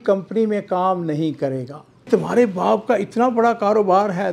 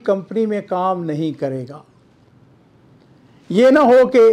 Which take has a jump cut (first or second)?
first